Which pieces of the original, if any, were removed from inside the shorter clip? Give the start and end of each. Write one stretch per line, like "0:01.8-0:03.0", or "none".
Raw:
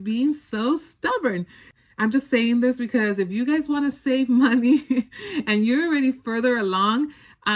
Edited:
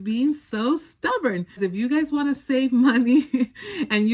0:01.6-0:03.1